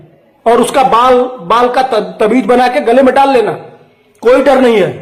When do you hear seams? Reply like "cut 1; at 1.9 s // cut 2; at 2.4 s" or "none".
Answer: none